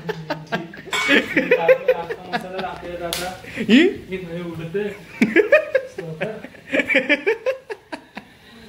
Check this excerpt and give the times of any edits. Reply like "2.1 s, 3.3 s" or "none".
7.4 s